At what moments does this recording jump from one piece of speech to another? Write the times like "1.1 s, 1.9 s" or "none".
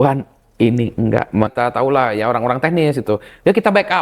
1.5 s